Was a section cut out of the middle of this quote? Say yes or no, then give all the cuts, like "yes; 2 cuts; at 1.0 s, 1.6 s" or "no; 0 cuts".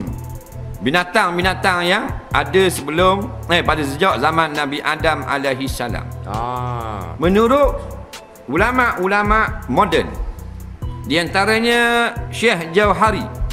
no; 0 cuts